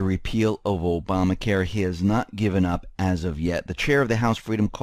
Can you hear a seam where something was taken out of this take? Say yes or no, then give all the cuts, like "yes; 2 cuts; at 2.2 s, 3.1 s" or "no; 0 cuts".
yes; 1 cut; at 2.3 s